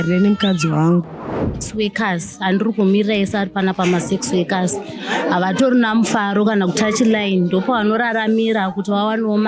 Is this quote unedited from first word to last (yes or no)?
no